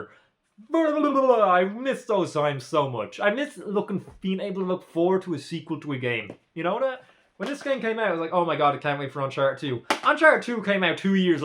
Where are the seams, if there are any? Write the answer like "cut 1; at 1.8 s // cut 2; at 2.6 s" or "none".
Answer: none